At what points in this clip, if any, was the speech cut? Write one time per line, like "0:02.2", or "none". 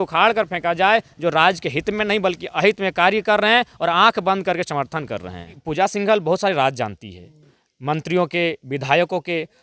0:05.6